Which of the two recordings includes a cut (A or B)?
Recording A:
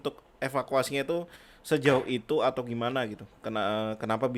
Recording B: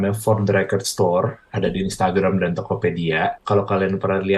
B